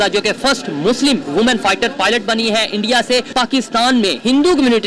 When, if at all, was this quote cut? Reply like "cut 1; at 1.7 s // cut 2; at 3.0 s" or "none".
cut 1; at 3.3 s